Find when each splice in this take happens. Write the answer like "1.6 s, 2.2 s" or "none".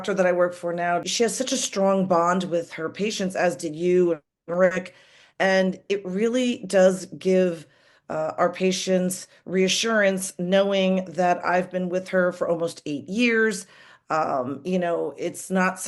1.0 s